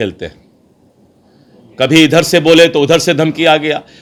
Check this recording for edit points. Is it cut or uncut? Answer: uncut